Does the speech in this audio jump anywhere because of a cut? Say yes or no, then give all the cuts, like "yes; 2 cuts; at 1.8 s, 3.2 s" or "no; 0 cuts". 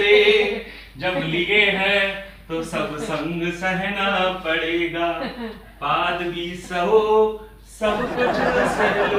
no; 0 cuts